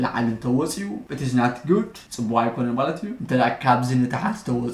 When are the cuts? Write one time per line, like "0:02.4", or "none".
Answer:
0:03.1